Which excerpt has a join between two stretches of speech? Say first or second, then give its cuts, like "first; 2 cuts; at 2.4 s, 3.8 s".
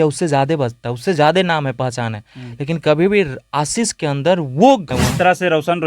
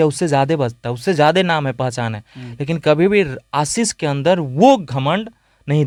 first; 1 cut; at 4.9 s